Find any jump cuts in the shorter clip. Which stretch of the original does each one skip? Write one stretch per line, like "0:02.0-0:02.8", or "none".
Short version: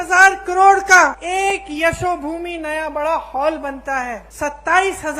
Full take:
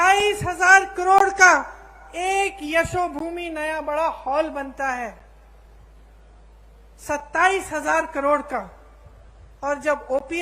0:01.7-0:02.1
0:05.2-0:06.9

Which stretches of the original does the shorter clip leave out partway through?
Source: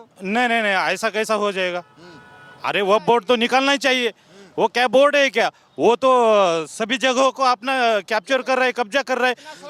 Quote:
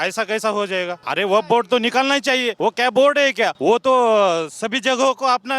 0:01.8-0:02.6
0:04.1-0:04.5
0:05.5-0:05.7

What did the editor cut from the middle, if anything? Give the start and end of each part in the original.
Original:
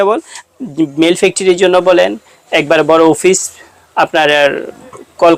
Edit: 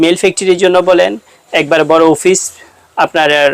none

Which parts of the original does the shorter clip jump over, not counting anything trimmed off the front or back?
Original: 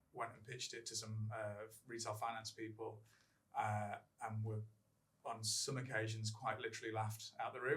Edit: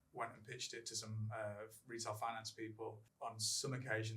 0:03.1-0:05.1

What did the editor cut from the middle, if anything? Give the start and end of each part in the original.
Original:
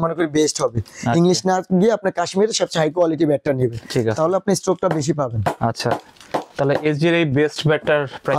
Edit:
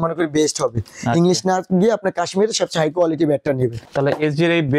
0:03.8-0:06.5

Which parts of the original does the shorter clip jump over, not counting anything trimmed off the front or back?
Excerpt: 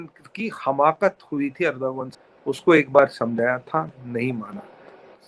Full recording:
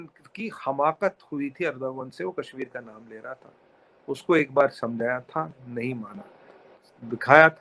0:02.1-0:03.7

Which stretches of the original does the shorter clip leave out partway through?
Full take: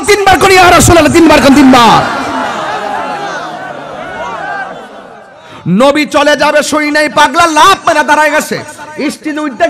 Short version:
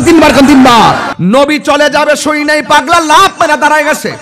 0:02.2-0:05.6

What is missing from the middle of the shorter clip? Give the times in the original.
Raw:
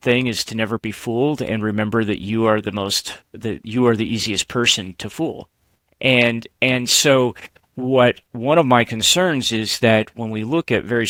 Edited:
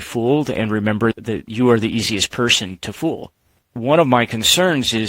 0:02.1-0:03.3
0:05.9-0:08.3

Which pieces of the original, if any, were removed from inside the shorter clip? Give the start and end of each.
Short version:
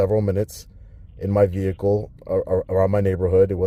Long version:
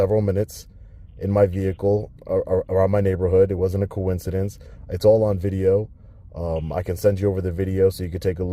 none

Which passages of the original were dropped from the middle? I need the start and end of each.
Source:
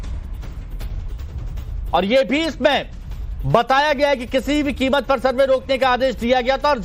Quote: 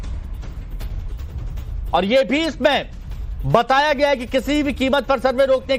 none

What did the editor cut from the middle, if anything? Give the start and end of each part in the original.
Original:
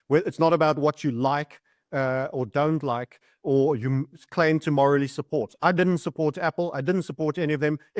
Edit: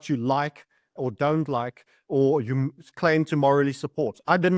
0:01.9-0:02.3

